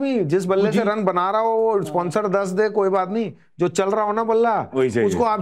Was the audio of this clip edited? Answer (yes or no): no